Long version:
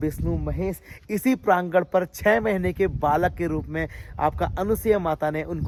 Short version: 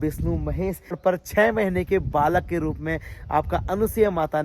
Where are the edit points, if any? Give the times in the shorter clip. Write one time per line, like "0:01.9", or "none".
0:01.0